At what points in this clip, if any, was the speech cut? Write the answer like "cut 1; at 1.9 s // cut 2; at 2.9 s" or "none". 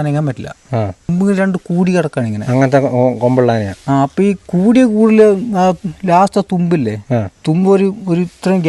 cut 1; at 1.1 s

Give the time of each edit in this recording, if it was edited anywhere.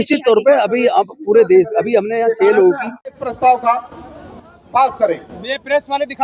cut 1; at 3.1 s

